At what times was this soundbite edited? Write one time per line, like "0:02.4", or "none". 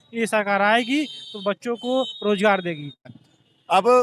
0:03.1